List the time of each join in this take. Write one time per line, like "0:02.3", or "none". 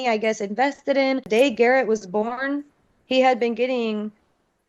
0:01.2